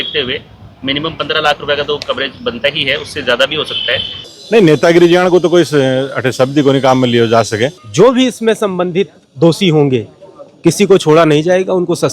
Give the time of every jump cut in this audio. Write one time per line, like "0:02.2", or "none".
0:04.3
0:07.8